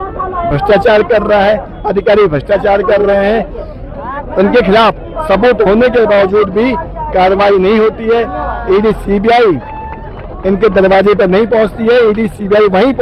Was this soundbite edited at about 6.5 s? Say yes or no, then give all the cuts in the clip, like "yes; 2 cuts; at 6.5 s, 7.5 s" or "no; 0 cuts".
no; 0 cuts